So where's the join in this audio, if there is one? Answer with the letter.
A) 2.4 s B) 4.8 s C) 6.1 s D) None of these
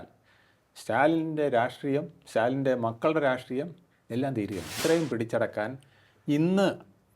B